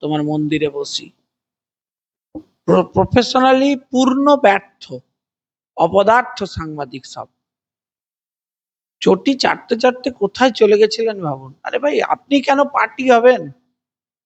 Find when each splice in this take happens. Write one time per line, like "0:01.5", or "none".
none